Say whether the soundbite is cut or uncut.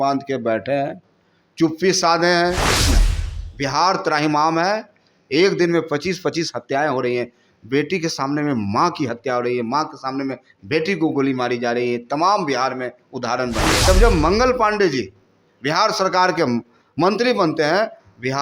cut